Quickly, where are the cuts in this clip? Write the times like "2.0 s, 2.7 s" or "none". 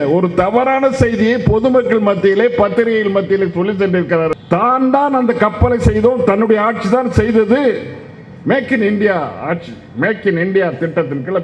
4.4 s